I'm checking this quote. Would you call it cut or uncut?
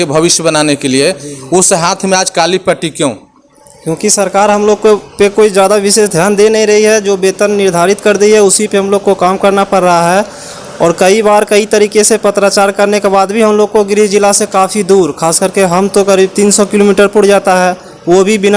uncut